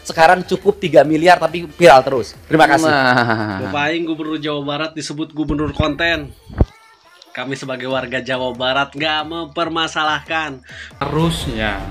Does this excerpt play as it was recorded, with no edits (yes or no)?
no